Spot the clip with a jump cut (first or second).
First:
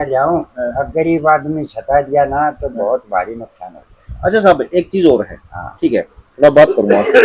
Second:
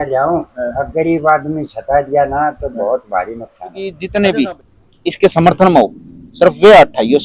second